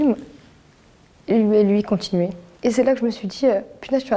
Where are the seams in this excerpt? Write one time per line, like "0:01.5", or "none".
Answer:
0:02.4